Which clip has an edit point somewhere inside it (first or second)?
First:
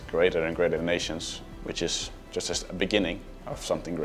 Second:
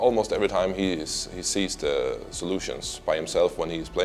first